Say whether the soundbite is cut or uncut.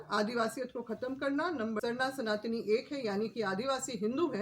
cut